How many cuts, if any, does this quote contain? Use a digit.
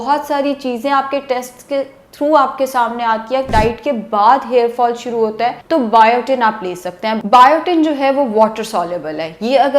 3